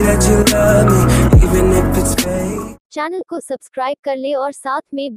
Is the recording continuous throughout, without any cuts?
no; 1 cut; at 2.8 s

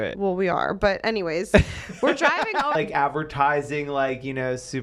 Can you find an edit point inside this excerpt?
yes; 1 cut; at 2.7 s

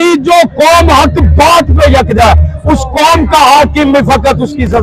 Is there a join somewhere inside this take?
no; 0 cuts

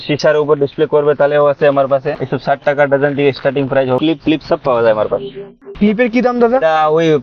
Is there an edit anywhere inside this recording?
yes; 1 cut; at 4.0 s

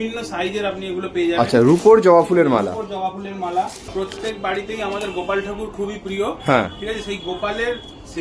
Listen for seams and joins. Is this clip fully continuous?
no; 1 cut; at 3.9 s

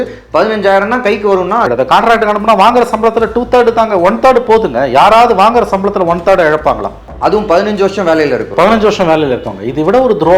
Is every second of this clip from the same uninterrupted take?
no; 2 cuts; at 1.7 s, 7.1 s

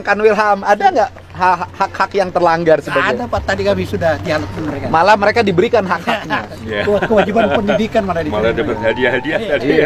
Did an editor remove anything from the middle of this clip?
no; 0 cuts

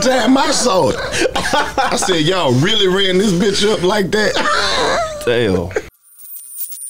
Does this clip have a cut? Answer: yes; 1 cut; at 5.9 s

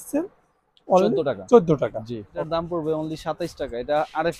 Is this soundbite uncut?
no; 1 cut; at 2.5 s

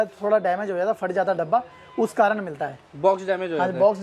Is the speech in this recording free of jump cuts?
yes; 0 cuts

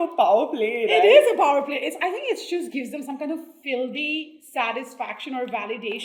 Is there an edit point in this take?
no; 0 cuts

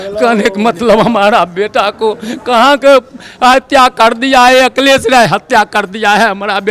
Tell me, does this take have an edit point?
no; 0 cuts

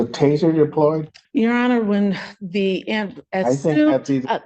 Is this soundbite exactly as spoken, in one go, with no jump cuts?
no; 1 cut; at 1.1 s

